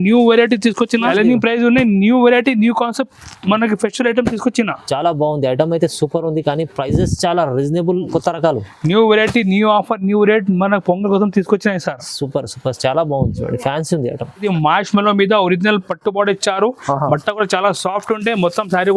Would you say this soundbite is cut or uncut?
cut